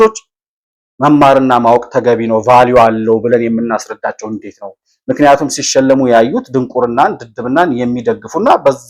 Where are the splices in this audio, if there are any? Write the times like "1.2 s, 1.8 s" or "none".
none

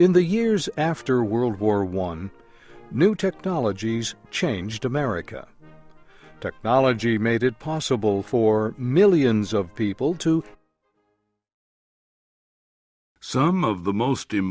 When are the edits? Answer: none

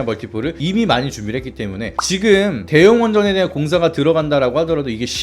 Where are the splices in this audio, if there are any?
1.9 s

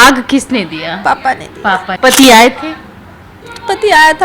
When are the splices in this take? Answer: 1.9 s

